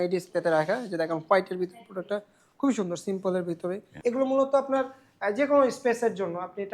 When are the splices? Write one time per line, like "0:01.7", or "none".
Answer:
0:03.9